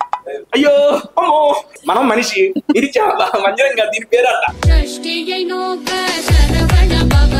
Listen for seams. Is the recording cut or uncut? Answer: cut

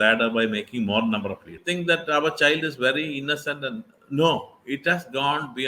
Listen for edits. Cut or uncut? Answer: cut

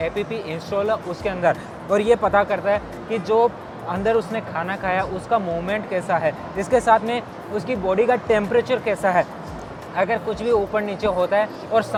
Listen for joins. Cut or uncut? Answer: uncut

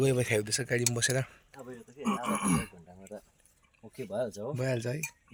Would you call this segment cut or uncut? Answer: uncut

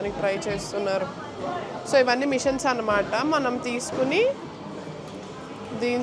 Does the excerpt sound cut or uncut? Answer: uncut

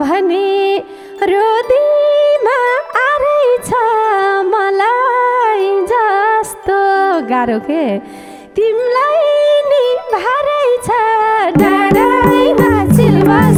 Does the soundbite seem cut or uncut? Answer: uncut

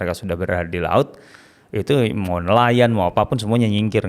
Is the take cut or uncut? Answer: uncut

